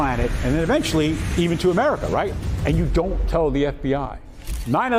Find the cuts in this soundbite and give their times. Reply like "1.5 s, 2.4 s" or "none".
none